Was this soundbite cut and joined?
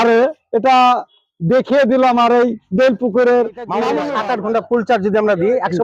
yes; 1 cut; at 4.0 s

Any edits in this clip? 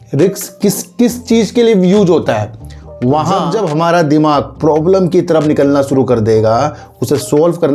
yes; 1 cut; at 3.5 s

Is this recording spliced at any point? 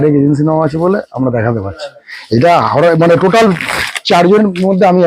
no; 0 cuts

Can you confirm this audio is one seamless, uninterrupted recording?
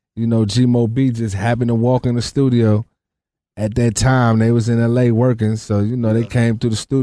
yes; 0 cuts

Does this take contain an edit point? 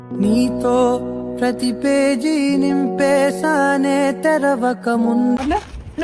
no; 0 cuts

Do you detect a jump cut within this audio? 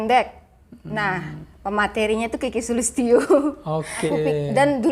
yes; 1 cut; at 4.0 s

